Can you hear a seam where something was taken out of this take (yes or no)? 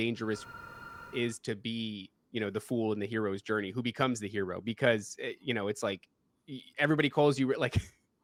no